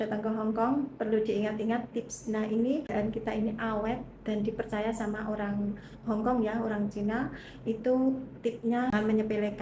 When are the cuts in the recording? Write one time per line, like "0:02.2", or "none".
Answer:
none